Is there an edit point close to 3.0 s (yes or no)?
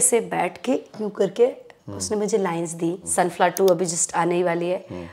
yes